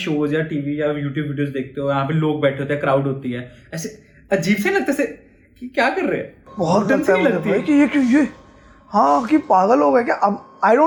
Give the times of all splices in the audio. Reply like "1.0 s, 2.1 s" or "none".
none